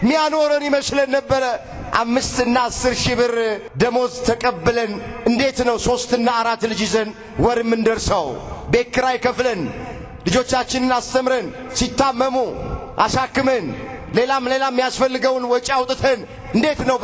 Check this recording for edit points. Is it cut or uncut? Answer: cut